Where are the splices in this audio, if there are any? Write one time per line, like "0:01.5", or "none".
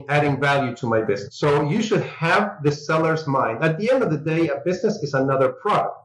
none